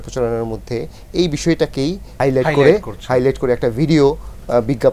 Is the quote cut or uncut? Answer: uncut